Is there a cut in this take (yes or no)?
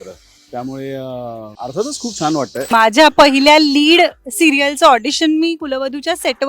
yes